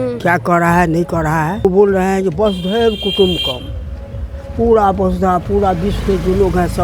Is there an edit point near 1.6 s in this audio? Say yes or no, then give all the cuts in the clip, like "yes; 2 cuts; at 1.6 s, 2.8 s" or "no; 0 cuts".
yes; 1 cut; at 1.6 s